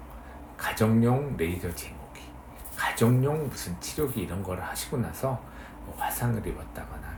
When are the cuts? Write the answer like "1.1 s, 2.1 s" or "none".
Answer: none